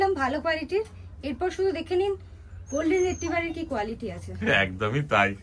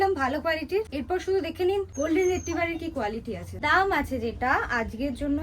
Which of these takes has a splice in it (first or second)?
second